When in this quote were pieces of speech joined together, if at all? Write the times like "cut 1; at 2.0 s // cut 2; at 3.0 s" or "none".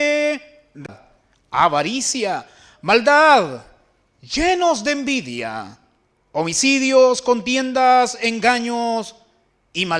cut 1; at 0.9 s